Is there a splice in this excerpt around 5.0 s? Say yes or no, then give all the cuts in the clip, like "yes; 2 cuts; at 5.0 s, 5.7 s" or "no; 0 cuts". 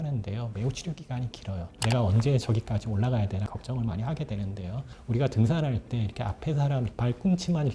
no; 1 cut; at 1.8 s